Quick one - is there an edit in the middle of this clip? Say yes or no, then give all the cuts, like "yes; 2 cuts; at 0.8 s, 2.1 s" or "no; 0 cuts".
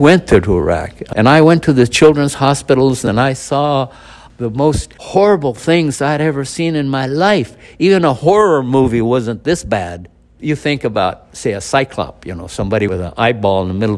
yes; 5 cuts; at 1.0 s, 3.0 s, 4.9 s, 10.4 s, 12.9 s